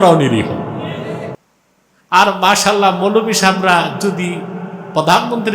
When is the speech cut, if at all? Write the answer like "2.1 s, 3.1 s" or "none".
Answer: 1.4 s